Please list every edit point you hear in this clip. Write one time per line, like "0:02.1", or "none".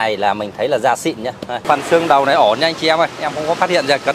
0:01.6